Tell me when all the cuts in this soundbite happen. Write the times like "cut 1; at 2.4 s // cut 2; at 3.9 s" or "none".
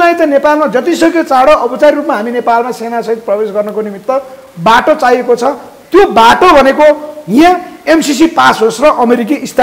none